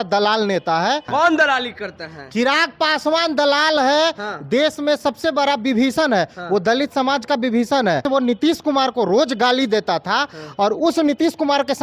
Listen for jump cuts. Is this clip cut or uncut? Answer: cut